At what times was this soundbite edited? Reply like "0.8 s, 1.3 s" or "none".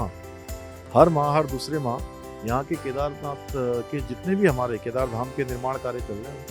none